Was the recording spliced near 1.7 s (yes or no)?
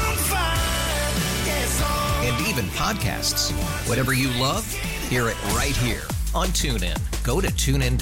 no